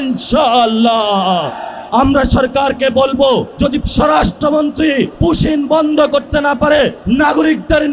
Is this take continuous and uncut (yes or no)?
no